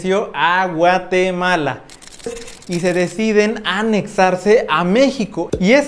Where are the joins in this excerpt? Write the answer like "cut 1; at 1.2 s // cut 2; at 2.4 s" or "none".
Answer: cut 1; at 2.3 s